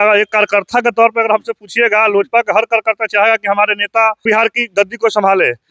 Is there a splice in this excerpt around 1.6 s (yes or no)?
no